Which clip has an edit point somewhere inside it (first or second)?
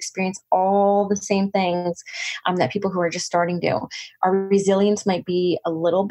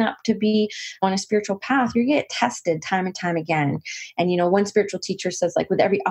second